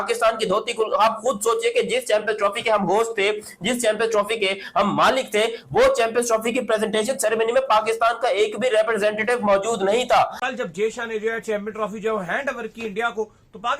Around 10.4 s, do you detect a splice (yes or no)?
yes